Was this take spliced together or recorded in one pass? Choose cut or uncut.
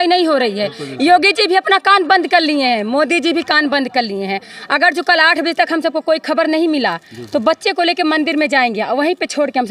uncut